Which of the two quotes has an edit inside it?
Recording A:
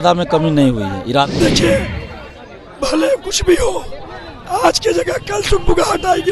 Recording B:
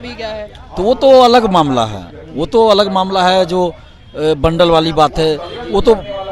A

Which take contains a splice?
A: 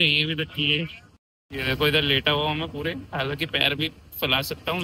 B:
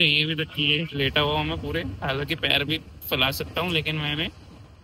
B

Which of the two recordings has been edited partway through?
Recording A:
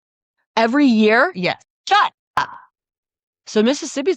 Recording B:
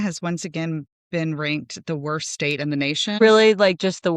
B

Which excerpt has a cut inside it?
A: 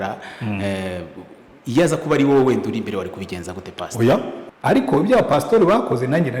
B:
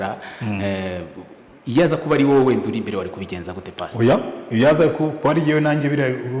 A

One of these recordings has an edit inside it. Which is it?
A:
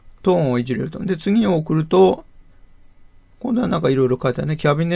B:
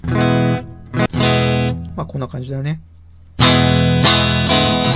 B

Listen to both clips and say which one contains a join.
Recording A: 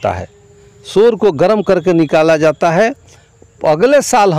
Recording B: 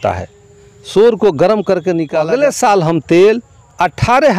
B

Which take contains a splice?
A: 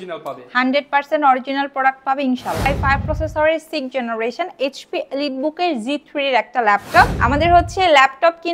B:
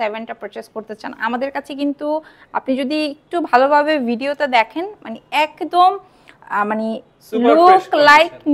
A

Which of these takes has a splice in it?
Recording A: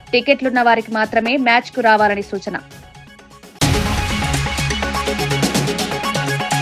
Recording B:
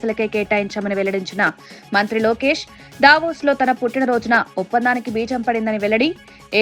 A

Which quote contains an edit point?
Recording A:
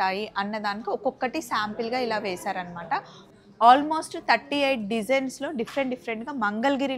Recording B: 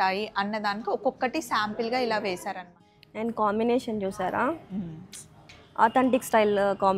B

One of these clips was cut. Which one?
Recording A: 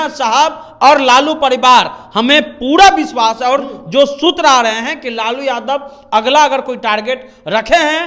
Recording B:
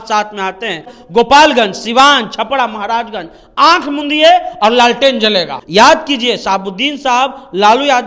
B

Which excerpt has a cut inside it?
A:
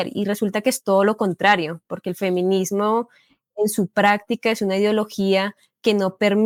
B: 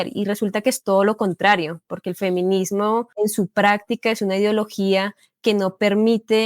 B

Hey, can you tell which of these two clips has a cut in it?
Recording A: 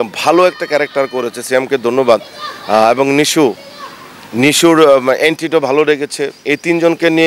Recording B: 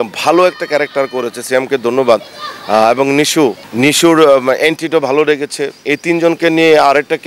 B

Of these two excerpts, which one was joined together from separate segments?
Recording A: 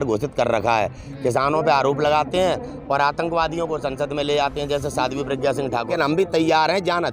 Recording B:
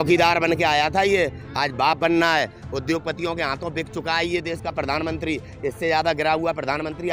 A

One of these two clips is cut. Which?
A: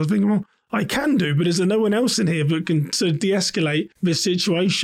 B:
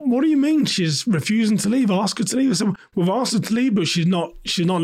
A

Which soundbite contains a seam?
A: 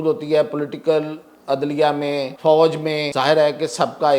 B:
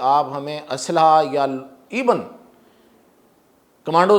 A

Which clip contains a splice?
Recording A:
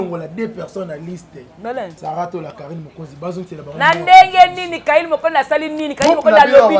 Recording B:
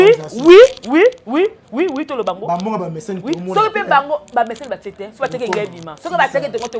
A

